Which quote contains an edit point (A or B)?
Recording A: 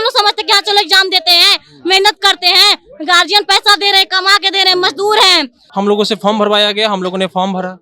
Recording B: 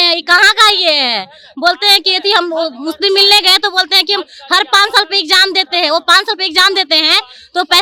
A